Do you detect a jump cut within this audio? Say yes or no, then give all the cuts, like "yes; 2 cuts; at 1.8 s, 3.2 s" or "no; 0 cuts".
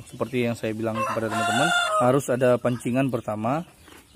yes; 1 cut; at 1.8 s